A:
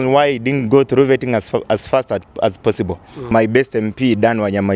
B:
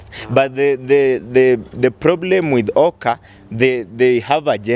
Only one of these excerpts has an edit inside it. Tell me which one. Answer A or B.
A